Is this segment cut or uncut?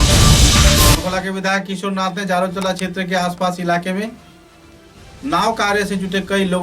cut